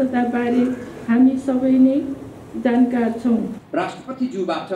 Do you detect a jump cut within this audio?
yes; 1 cut; at 3.6 s

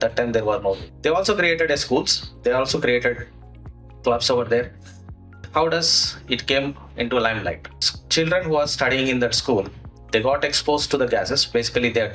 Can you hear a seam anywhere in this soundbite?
yes; 2 cuts; at 0.9 s, 5.4 s

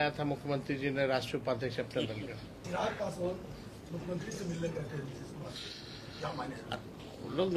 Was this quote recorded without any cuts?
no; 1 cut; at 2.6 s

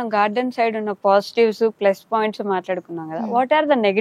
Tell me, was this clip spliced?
no; 0 cuts

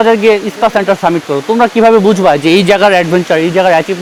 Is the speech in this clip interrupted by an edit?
no; 0 cuts

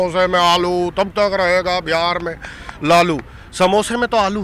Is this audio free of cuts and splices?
yes; 0 cuts

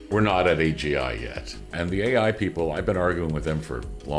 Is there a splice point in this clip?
yes; 1 cut; at 1.8 s

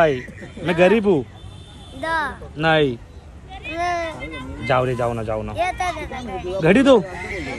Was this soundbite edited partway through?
no; 0 cuts

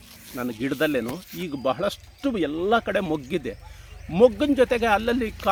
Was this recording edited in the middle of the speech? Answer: no; 0 cuts

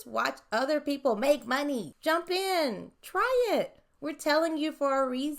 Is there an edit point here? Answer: yes; 1 cut; at 1.9 s

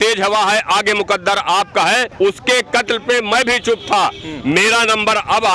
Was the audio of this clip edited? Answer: no; 0 cuts

